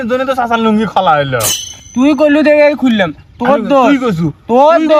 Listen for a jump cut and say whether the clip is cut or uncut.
uncut